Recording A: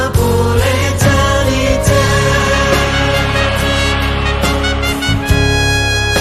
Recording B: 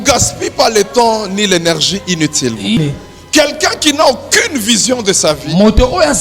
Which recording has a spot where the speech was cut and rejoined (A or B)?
B